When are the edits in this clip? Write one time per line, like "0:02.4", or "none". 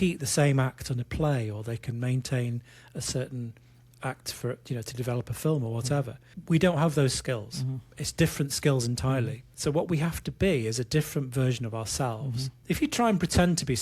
0:06.3
0:09.4
0:12.5

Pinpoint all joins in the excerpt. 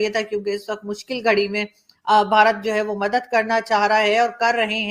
none

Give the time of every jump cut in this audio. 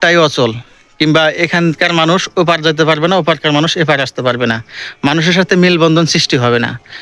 none

